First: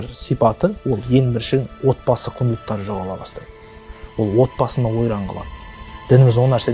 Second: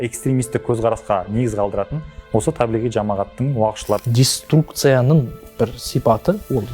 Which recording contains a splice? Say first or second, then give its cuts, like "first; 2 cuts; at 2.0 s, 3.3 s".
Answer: second; 1 cut; at 4.0 s